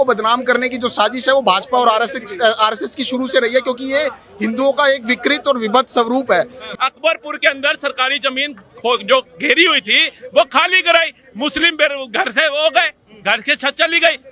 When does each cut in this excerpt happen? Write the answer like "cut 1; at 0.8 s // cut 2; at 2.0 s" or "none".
cut 1; at 6.6 s